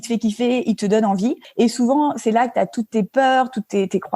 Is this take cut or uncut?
cut